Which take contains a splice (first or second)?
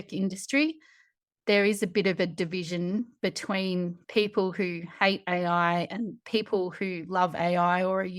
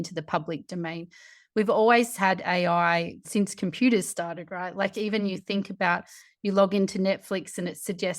second